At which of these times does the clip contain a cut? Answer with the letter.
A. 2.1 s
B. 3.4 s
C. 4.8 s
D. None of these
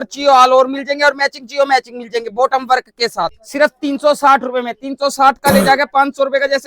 B